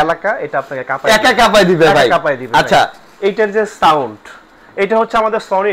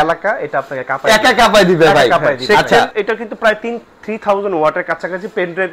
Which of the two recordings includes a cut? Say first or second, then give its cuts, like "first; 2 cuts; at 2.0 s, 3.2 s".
second; 1 cut; at 2.9 s